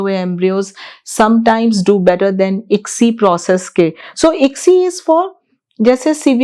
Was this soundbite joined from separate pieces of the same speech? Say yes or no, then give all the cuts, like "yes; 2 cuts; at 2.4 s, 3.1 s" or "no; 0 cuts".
no; 0 cuts